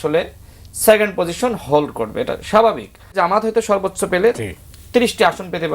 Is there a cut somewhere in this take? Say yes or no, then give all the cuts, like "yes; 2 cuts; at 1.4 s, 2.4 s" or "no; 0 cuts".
yes; 1 cut; at 3.2 s